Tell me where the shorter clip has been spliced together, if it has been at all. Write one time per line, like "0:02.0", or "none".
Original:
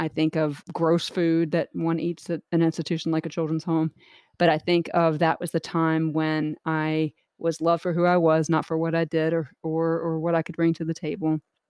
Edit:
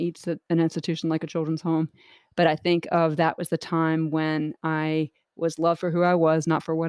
none